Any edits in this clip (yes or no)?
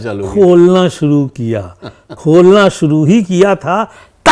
no